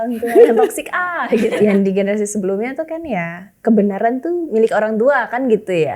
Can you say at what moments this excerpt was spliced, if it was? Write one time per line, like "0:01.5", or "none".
0:01.5